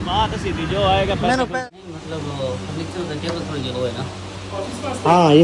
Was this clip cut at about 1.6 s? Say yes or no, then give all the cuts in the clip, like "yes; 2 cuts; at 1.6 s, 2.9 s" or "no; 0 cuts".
yes; 1 cut; at 1.6 s